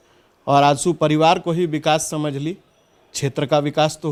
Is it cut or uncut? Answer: uncut